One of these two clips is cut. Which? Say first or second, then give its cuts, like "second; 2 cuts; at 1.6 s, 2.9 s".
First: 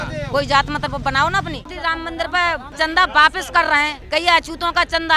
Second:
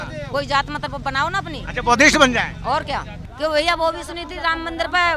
first; 3 cuts; at 1.6 s, 2.7 s, 4.0 s